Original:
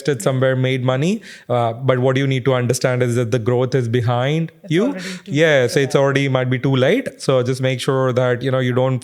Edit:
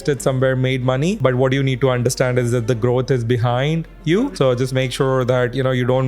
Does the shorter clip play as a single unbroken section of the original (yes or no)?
no